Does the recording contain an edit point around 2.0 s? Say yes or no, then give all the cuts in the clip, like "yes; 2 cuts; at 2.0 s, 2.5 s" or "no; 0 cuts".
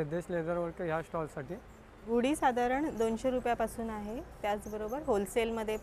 yes; 1 cut; at 2.0 s